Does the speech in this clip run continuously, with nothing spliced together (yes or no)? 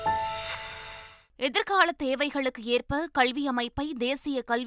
no